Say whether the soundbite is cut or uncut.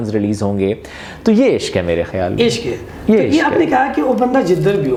uncut